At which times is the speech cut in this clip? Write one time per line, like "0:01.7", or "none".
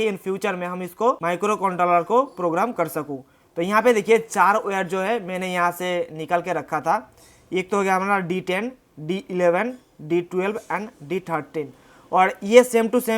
0:01.2